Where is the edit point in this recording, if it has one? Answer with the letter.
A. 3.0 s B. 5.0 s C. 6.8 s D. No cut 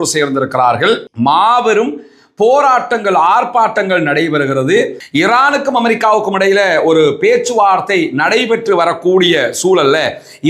B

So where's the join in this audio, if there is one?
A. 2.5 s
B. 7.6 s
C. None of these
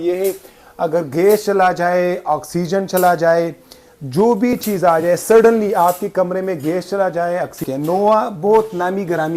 B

